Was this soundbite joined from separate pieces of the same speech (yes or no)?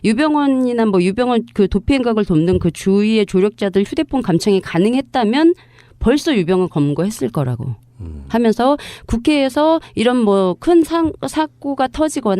yes